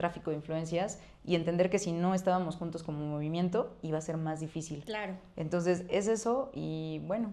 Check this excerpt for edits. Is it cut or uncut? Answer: uncut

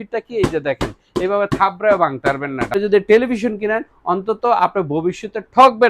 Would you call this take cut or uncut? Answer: cut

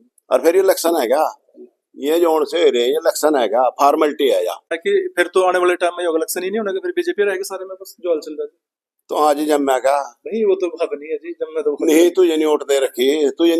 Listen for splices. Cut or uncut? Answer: cut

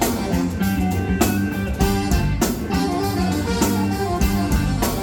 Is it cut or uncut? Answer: uncut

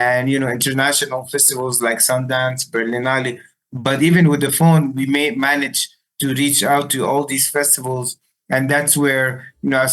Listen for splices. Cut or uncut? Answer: uncut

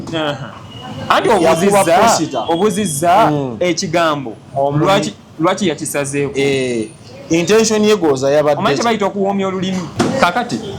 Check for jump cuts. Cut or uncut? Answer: cut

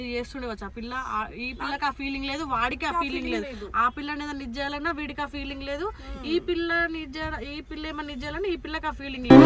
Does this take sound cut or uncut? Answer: uncut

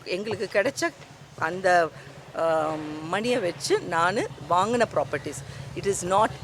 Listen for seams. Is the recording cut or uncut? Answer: uncut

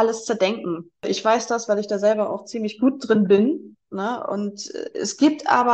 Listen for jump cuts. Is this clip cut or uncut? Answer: cut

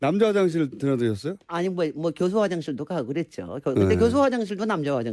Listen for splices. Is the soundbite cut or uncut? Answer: uncut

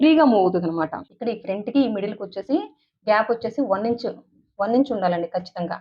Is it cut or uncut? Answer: cut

